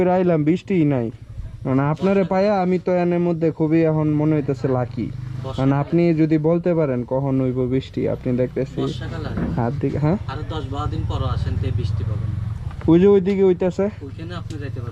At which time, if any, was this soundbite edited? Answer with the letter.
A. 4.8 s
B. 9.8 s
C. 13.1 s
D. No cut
D